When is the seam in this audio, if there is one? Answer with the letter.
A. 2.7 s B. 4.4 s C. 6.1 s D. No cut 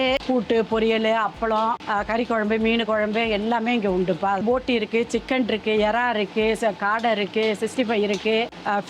B